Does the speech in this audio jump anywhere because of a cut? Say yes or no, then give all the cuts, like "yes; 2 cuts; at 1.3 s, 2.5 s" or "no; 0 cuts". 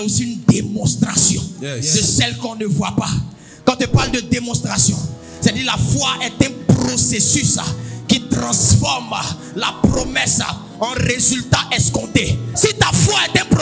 no; 0 cuts